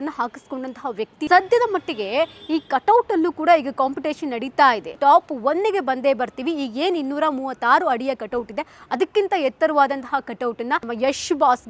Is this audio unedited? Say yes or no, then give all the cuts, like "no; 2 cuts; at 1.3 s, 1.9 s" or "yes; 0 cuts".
no; 3 cuts; at 1.3 s, 5.0 s, 10.9 s